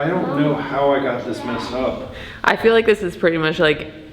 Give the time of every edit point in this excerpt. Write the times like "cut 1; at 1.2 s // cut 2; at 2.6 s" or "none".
cut 1; at 2.3 s

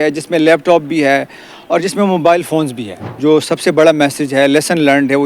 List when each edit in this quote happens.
cut 1; at 3.1 s

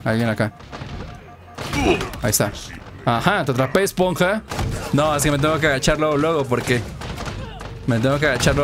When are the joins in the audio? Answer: cut 1; at 4.6 s

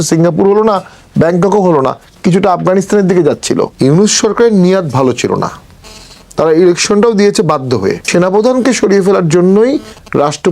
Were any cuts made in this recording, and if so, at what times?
cut 1; at 3.7 s // cut 2; at 8.0 s

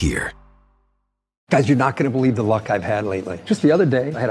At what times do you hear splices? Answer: cut 1; at 1.3 s

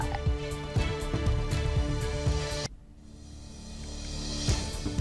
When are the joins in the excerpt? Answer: cut 1; at 2.6 s

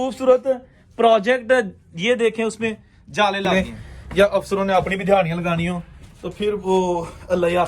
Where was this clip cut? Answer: cut 1; at 3.5 s

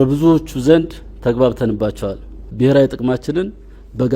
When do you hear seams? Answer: cut 1; at 2.4 s

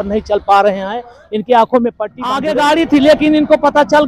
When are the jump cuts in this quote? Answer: cut 1; at 2.4 s

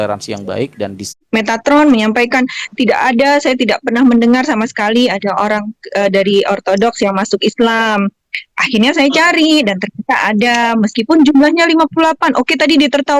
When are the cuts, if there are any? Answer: cut 1; at 1.1 s

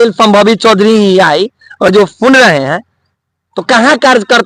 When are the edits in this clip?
none

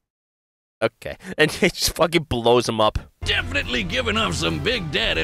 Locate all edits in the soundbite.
cut 1; at 3.2 s

